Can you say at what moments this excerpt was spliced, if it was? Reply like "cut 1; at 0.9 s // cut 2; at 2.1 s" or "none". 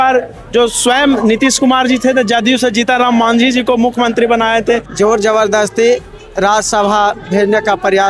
cut 1; at 4.9 s